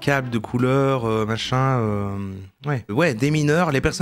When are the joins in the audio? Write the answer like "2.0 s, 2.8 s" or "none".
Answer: 2.9 s

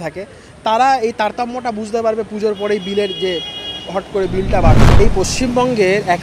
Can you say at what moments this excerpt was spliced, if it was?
5.0 s

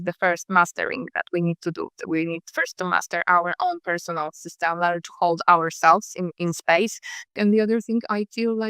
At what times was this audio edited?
7.4 s

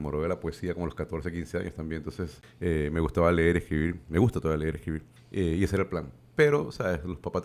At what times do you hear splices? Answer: 2.4 s, 5.1 s

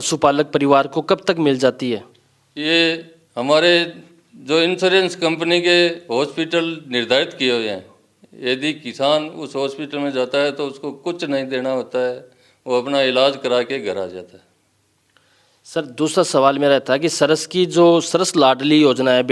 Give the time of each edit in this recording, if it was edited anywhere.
none

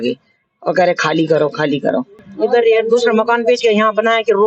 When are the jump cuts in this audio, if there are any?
2.3 s

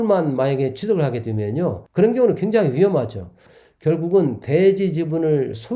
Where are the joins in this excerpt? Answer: 1.8 s, 3.5 s

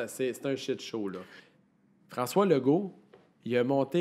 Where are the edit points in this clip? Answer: 1.4 s

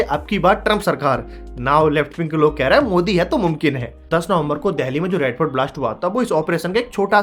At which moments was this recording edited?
4.0 s

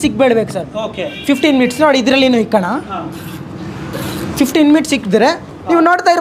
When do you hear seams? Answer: none

